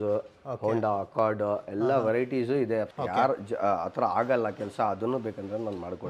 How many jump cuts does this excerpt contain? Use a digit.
1